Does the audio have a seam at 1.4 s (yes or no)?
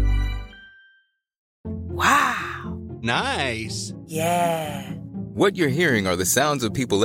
yes